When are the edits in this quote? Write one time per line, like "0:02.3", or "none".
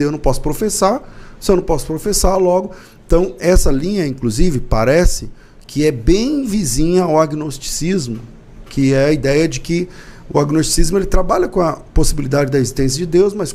none